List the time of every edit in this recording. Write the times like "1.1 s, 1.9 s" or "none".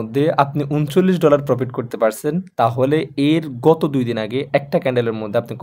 none